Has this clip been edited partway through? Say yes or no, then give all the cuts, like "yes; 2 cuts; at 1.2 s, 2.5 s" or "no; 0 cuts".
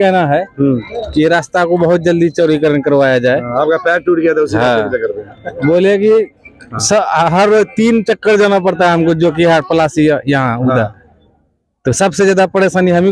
no; 0 cuts